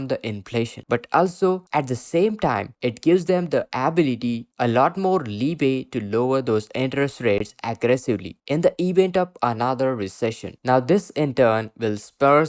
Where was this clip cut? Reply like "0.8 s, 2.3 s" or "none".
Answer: none